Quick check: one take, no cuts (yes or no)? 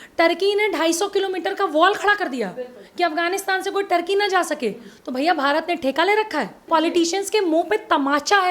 no